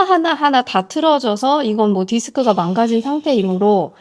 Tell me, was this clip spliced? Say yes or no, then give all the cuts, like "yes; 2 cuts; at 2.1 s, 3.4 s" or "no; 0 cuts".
no; 0 cuts